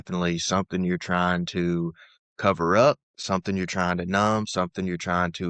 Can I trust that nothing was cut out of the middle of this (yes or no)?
yes